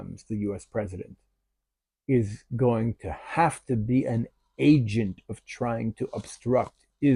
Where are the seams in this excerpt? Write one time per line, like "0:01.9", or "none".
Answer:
none